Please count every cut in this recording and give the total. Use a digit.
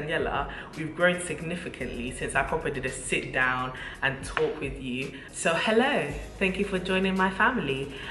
1